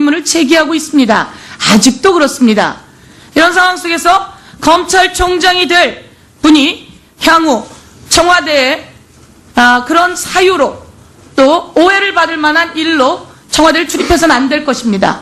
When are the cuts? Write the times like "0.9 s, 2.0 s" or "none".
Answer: 4.2 s